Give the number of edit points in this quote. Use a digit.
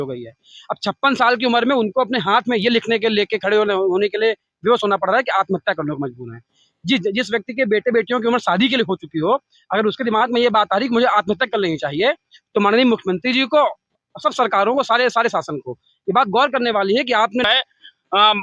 1